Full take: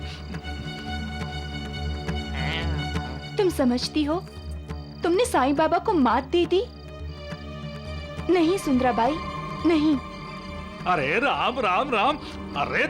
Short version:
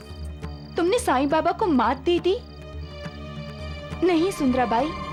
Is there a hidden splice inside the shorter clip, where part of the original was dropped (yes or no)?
no